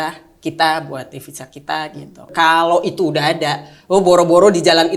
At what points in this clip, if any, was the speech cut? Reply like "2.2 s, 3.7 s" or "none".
2.3 s